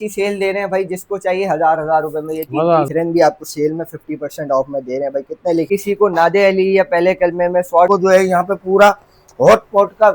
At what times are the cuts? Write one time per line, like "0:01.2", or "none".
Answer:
0:02.9
0:05.7
0:07.9